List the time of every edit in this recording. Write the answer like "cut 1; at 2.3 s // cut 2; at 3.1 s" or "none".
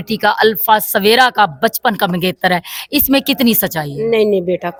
none